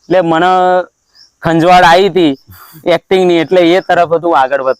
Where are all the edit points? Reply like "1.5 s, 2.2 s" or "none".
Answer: none